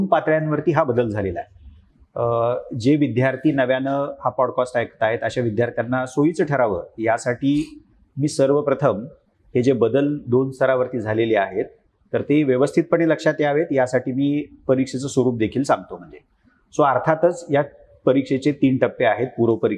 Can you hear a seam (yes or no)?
no